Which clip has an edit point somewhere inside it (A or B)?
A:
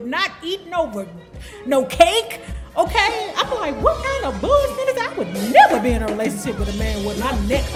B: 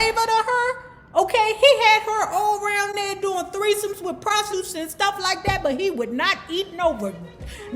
B